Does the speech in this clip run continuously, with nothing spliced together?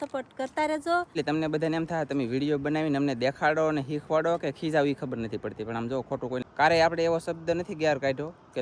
no; 2 cuts; at 1.1 s, 6.4 s

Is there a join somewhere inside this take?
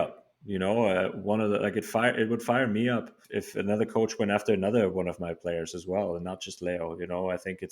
yes; 1 cut; at 3.2 s

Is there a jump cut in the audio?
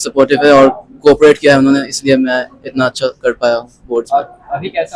no; 0 cuts

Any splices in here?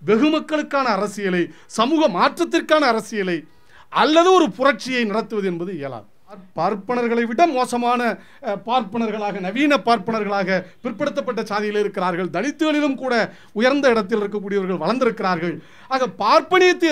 yes; 1 cut; at 6.5 s

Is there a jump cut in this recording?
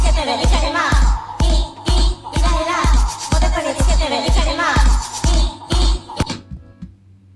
no; 0 cuts

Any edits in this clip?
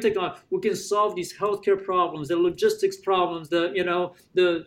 no; 0 cuts

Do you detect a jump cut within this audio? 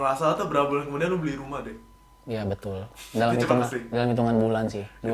no; 0 cuts

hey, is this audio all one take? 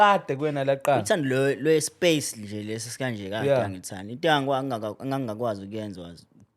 yes; 0 cuts

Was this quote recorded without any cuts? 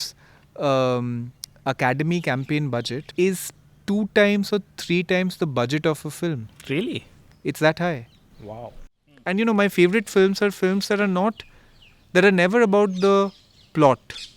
no; 2 cuts; at 3.1 s, 8.7 s

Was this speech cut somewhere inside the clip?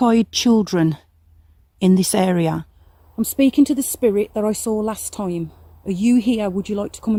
no; 0 cuts

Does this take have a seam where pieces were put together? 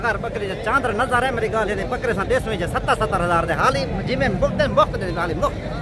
no; 0 cuts

